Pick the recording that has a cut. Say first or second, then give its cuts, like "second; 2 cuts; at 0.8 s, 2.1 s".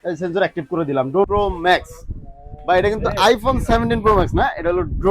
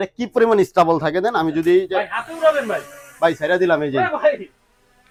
first; 1 cut; at 1.3 s